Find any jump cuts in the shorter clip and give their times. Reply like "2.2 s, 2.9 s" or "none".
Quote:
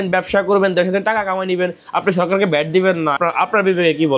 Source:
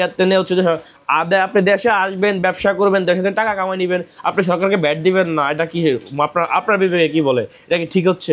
3.2 s

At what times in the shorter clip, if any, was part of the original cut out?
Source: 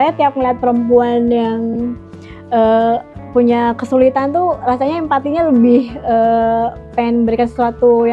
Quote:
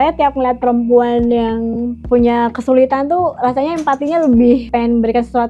1.9 s, 4.7 s

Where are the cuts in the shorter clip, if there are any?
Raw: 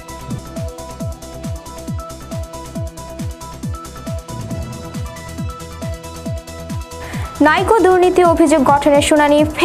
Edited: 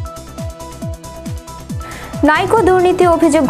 2.2 s

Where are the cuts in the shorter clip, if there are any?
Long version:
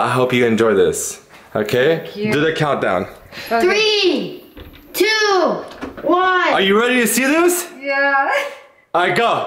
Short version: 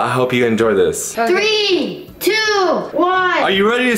1.0 s, 2.0 s, 2.9 s

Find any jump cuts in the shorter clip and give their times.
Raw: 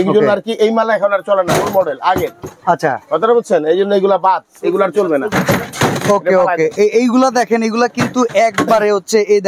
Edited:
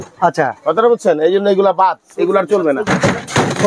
none

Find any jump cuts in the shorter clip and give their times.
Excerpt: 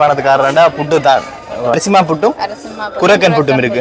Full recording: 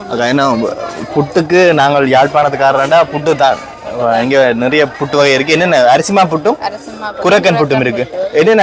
1.7 s

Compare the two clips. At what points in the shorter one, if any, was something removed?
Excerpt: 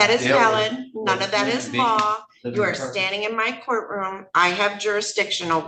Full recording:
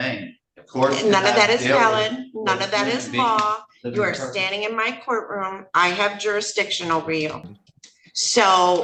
none

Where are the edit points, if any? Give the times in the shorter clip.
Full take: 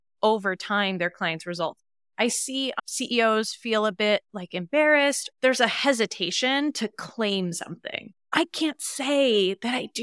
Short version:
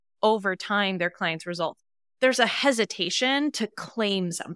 2.0 s

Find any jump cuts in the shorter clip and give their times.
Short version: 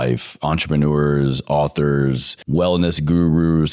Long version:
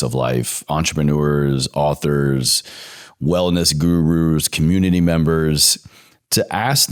2.3 s

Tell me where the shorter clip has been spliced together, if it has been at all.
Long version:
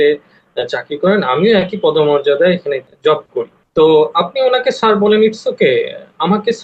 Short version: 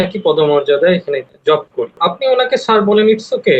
2.0 s

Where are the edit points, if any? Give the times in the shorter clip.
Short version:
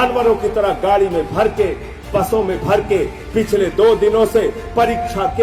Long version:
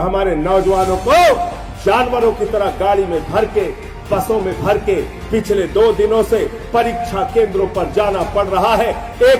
none

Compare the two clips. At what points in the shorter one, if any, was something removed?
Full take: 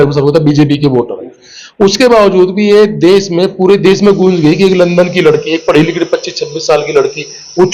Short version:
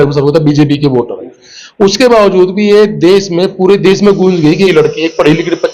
4.7 s

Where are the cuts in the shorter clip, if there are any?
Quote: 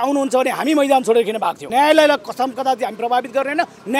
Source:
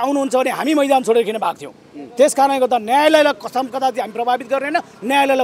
1.7 s

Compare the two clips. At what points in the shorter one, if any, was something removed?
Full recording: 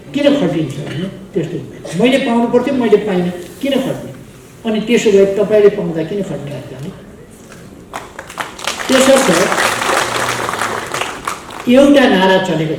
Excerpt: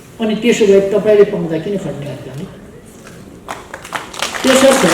none

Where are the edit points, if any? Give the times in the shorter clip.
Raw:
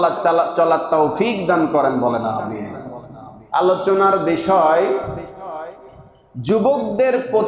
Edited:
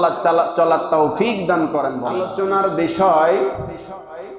2.1 s

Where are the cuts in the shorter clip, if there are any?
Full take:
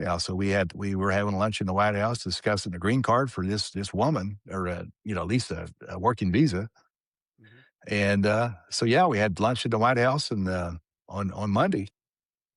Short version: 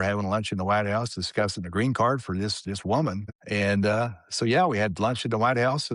3.3 s

